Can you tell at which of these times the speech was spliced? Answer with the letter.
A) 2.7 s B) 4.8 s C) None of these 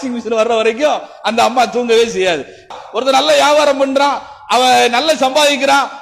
A